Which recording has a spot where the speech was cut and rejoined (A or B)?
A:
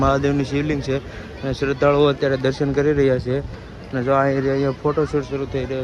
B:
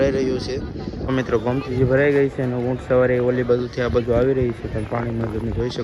B